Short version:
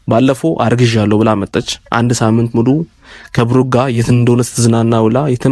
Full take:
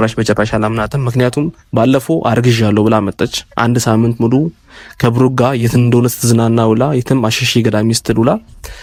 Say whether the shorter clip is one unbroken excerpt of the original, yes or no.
yes